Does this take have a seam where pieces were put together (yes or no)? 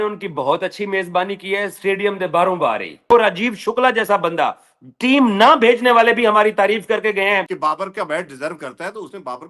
yes